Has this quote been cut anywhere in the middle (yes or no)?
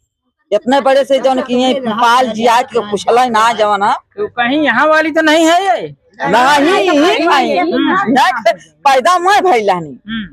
no